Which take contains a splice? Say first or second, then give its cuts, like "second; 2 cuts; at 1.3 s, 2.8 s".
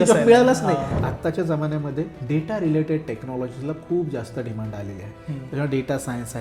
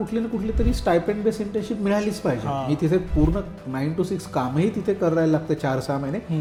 first; 2 cuts; at 0.9 s, 2.2 s